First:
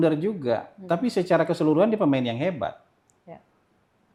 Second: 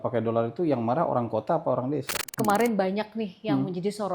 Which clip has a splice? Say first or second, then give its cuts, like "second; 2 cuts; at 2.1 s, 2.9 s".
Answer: second; 1 cut; at 2.2 s